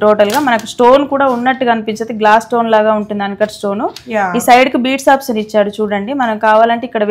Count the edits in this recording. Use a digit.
0